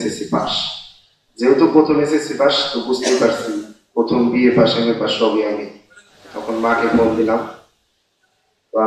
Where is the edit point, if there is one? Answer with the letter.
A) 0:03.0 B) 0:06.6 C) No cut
B